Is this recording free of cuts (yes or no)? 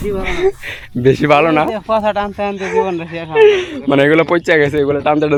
yes